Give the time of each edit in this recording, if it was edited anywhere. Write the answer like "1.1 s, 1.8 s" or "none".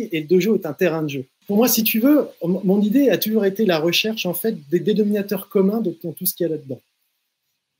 1.3 s